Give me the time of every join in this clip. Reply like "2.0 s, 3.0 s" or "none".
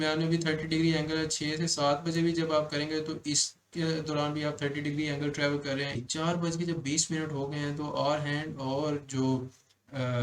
6.0 s